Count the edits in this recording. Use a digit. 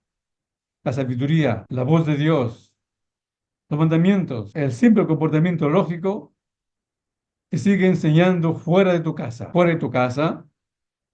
3